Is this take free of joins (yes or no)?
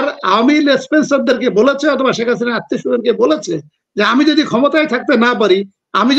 yes